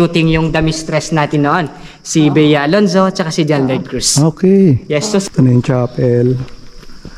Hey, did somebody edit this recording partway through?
yes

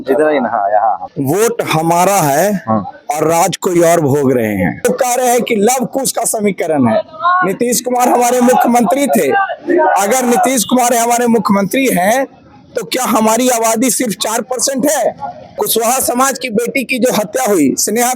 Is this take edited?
yes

